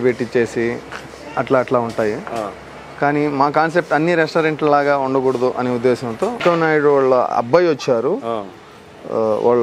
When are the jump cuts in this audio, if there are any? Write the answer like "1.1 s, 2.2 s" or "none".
6.4 s